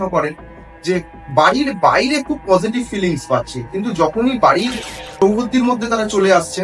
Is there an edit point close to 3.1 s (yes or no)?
no